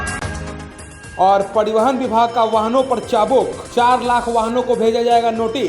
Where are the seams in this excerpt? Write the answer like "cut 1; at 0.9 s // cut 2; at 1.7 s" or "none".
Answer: none